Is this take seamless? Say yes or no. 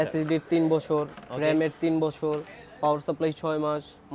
yes